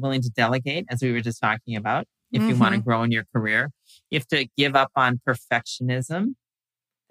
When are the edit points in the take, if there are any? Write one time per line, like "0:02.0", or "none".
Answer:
none